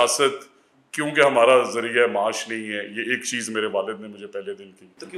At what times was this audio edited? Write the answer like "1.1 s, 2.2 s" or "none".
none